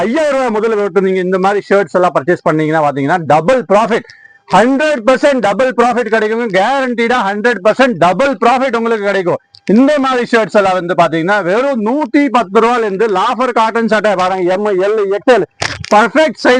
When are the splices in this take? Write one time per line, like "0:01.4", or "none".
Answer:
none